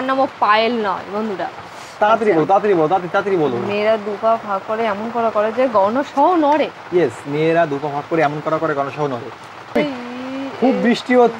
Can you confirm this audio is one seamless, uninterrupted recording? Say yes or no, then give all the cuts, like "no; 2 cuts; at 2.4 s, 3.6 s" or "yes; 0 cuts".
no; 1 cut; at 9.8 s